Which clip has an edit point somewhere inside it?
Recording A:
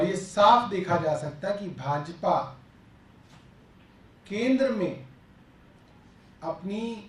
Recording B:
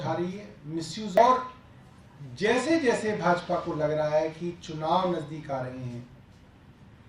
B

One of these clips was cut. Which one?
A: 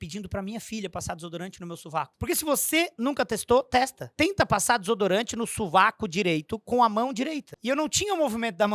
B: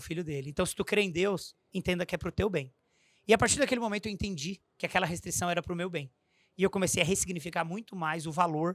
A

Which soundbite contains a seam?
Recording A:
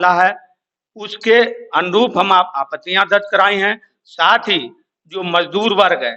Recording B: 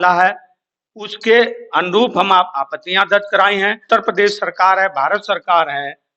B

